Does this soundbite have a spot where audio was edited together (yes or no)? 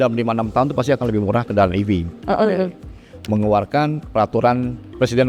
yes